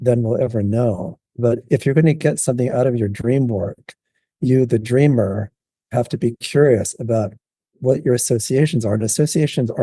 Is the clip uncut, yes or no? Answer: yes